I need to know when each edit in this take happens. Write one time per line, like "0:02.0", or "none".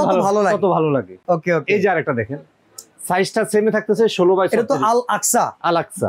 none